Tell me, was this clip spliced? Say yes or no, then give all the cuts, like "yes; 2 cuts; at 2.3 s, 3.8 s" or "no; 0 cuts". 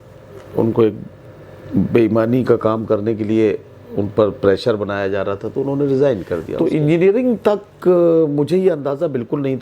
yes; 1 cut; at 6.5 s